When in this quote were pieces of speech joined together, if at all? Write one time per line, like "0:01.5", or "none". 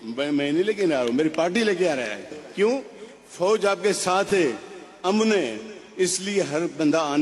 0:02.4